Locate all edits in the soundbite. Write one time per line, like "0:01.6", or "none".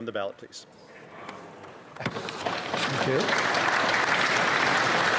none